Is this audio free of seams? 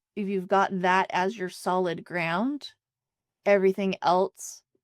yes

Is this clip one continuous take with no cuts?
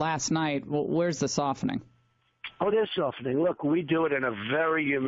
no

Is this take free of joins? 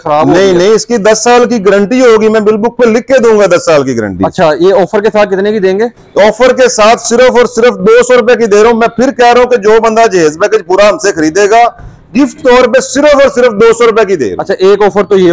yes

